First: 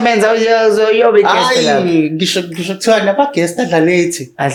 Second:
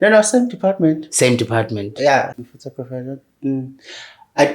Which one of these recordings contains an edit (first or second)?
second